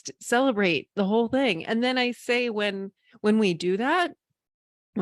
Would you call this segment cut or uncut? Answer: uncut